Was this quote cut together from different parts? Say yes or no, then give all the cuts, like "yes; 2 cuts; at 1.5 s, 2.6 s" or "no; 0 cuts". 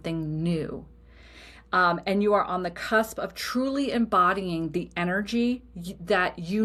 no; 0 cuts